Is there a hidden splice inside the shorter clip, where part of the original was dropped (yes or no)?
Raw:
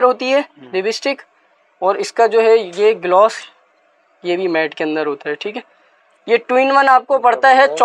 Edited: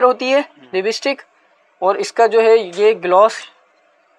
no